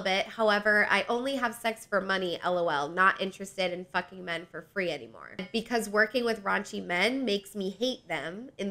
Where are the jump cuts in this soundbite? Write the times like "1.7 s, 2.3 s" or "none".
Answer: 5.5 s